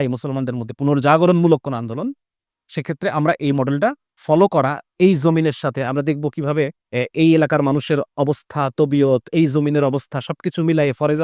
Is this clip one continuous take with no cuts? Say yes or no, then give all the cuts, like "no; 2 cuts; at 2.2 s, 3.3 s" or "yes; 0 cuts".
no; 2 cuts; at 4.1 s, 6.8 s